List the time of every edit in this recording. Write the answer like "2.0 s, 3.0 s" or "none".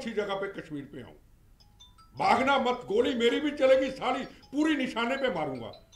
none